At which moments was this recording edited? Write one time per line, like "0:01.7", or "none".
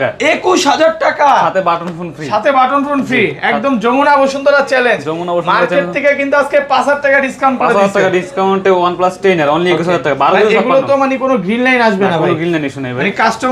none